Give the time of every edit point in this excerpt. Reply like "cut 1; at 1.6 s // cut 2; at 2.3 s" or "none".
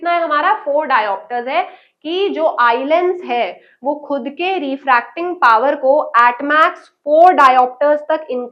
none